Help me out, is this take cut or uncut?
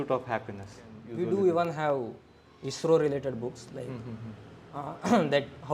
cut